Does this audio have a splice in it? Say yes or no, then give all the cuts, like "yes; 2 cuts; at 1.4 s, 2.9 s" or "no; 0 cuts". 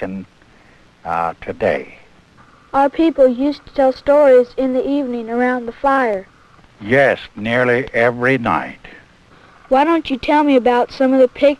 yes; 1 cut; at 4.0 s